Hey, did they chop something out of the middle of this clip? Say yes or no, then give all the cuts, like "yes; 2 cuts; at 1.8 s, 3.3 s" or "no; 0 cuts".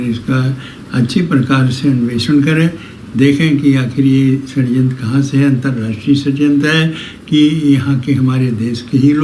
no; 0 cuts